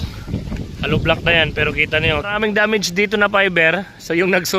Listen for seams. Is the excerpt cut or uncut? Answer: cut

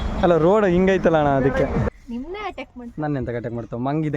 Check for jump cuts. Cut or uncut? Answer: cut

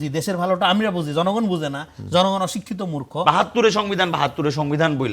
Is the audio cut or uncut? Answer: cut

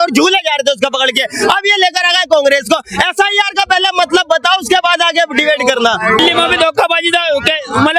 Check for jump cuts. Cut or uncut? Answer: cut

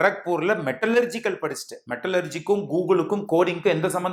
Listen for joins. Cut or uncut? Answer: uncut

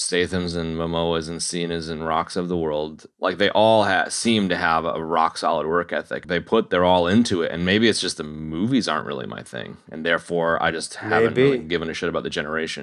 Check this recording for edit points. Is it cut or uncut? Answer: cut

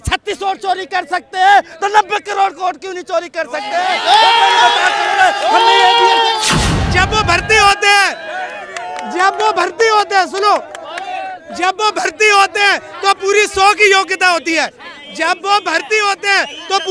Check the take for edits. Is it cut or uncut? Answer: cut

